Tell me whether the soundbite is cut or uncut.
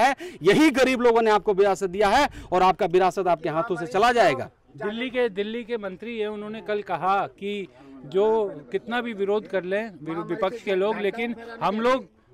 uncut